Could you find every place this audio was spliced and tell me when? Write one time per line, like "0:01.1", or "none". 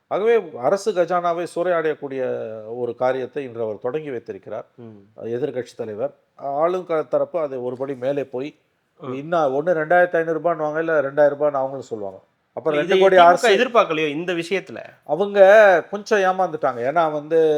none